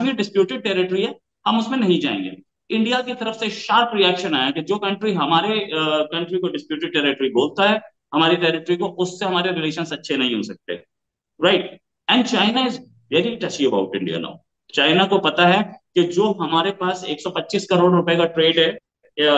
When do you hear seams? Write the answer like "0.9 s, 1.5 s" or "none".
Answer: none